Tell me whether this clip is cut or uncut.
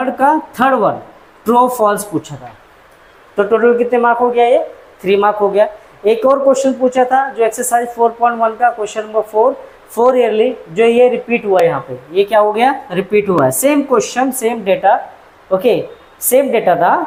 uncut